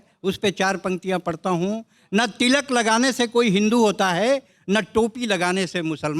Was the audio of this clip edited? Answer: no; 0 cuts

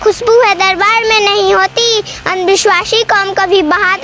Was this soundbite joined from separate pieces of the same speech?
no; 0 cuts

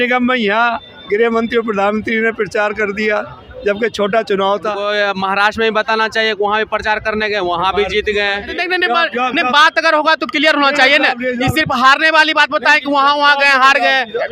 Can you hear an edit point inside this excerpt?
yes; 2 cuts; at 4.8 s, 8.5 s

